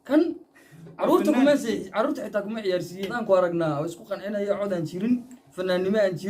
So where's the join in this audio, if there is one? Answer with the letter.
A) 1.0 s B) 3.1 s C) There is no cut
B